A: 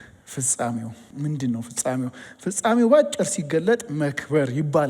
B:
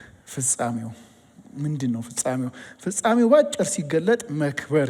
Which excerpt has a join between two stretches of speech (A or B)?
A